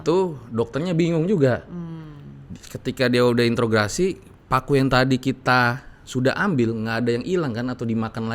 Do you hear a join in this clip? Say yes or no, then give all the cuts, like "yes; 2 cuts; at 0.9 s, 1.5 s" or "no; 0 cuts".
no; 0 cuts